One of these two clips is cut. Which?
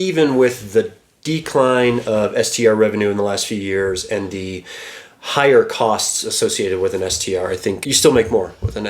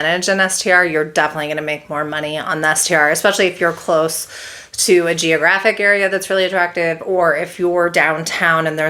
first; 1 cut; at 7.9 s

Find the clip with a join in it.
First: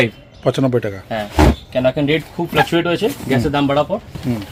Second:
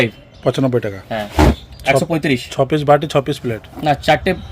second; 1 cut; at 1.6 s

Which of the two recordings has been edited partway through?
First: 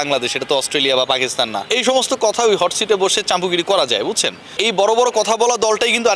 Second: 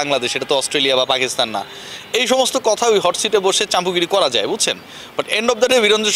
first; 2 cuts; at 1.6 s, 4.5 s

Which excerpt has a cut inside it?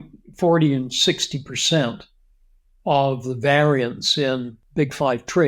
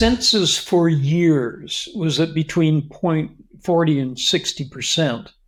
first; 1 cut; at 4.6 s

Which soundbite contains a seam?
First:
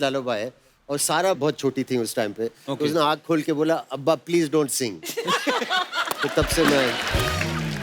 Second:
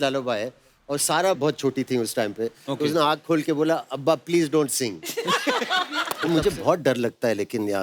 second; 1 cut; at 6.1 s

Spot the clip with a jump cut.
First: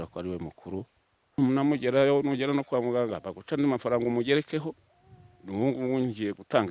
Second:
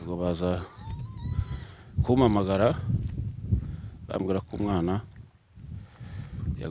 first; 1 cut; at 1.4 s

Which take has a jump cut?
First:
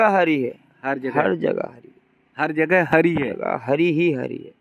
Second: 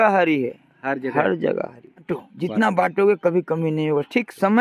second; 1 cut; at 2.0 s

